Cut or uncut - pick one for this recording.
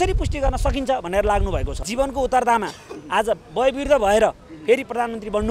cut